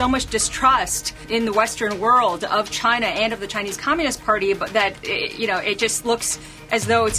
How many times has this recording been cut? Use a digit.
1